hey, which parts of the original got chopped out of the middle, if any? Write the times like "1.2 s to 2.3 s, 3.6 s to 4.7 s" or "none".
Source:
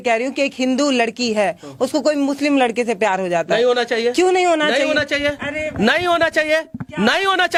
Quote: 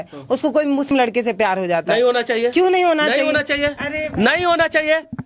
2.4 s to 2.5 s